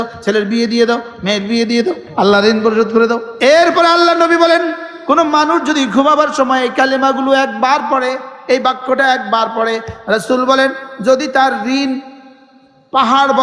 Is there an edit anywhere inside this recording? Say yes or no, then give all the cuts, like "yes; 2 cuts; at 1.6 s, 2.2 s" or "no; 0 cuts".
yes; 2 cuts; at 2.1 s, 3.3 s